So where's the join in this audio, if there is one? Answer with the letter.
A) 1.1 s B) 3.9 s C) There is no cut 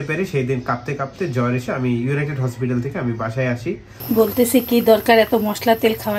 B